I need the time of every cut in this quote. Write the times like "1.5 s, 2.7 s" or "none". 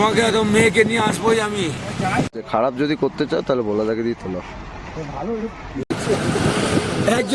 2.3 s, 5.9 s